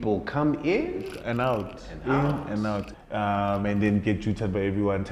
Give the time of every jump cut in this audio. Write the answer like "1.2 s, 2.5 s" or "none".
2.9 s

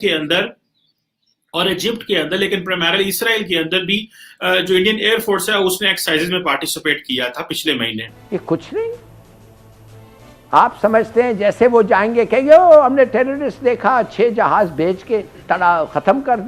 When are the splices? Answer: 8.1 s

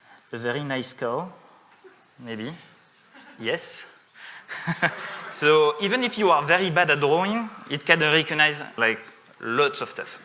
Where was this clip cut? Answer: 8.8 s

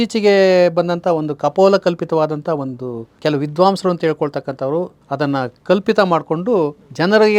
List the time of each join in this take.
3.1 s, 5.0 s

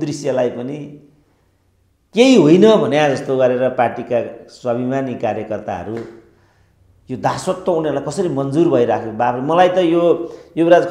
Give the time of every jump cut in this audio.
none

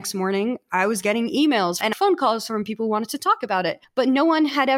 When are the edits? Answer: 1.8 s, 3.8 s

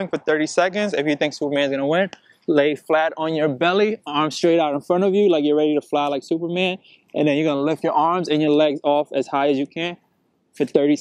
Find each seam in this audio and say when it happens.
1.4 s, 7.8 s

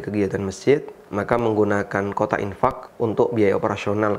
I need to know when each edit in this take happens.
1.0 s, 2.9 s

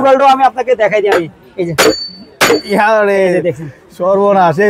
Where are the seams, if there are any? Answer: none

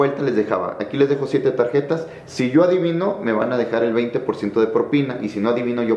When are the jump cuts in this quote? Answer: none

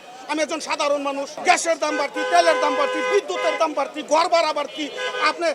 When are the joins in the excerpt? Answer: 1.3 s

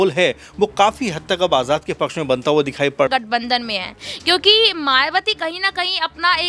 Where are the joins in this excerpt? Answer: 3.1 s

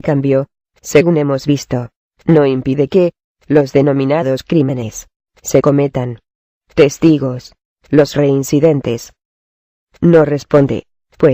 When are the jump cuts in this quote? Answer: 8.1 s

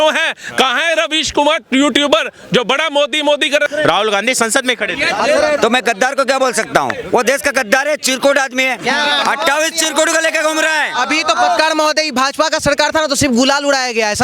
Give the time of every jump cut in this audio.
3.7 s

